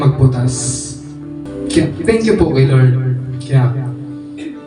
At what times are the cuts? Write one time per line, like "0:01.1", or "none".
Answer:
0:01.5